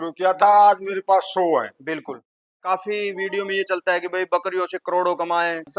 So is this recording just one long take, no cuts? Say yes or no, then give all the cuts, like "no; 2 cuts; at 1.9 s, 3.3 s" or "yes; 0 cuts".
no; 1 cut; at 2.4 s